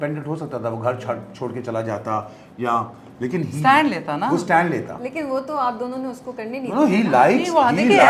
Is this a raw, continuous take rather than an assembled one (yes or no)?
yes